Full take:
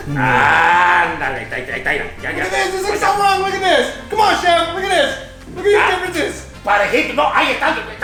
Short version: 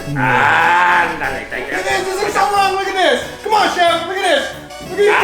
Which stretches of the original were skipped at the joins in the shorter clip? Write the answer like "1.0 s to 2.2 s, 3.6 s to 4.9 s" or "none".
1.6 s to 2.3 s